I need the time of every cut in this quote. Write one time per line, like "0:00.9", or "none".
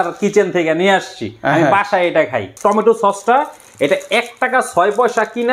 0:02.4